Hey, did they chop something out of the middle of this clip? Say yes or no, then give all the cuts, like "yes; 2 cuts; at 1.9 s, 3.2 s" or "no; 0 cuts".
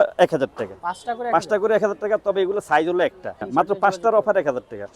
yes; 1 cut; at 3.5 s